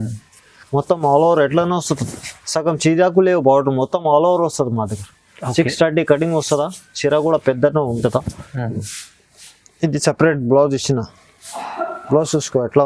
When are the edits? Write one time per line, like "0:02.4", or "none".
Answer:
none